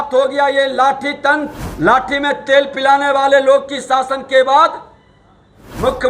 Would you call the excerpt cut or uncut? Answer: cut